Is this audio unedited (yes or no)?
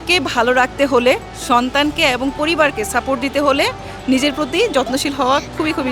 yes